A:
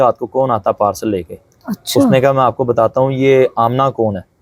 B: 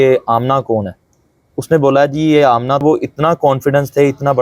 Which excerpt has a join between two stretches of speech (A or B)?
B